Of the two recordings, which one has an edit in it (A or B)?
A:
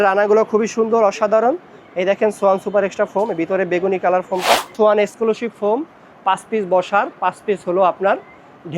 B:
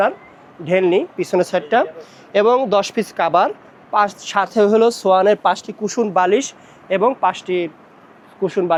A